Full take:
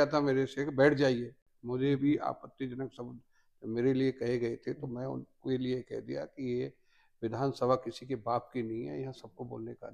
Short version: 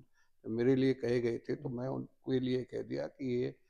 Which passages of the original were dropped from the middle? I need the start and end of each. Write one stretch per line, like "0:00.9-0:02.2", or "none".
none

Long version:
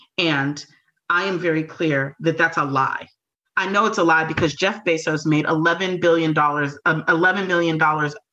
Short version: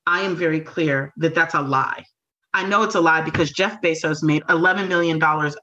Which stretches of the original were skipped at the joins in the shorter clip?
0:05.4-0:07.0

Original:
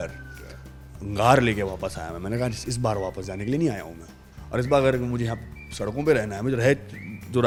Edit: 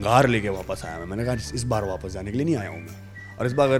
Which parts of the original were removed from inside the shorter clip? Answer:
none

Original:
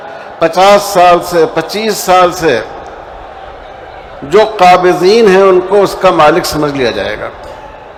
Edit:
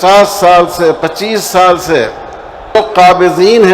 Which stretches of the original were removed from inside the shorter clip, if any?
0:03.3-0:04.4

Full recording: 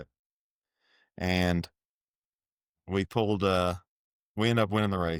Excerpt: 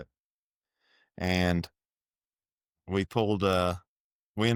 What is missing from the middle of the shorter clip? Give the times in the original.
none

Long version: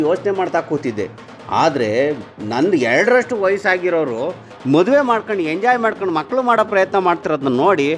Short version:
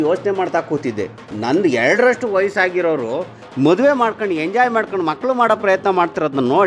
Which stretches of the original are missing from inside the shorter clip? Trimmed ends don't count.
0:01.2-0:02.3

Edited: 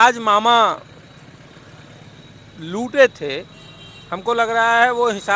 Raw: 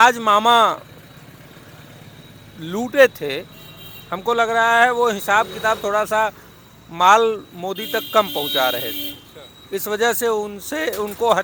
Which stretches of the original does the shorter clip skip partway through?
none

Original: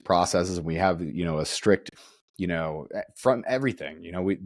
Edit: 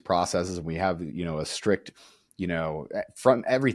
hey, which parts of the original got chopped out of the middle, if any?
none

